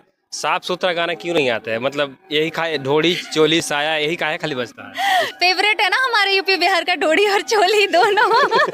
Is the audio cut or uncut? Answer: cut